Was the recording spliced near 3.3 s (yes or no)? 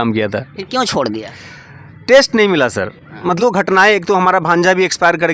yes